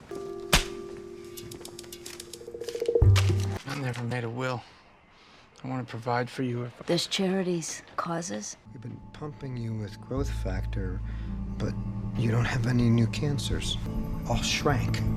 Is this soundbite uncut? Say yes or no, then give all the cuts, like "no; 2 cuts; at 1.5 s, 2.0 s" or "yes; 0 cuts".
yes; 0 cuts